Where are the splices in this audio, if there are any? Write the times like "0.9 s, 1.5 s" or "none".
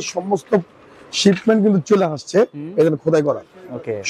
none